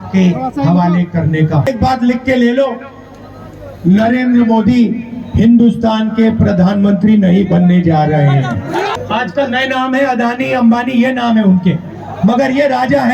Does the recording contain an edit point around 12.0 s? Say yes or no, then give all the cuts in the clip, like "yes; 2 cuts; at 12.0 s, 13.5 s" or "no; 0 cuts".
no; 2 cuts; at 1.7 s, 8.9 s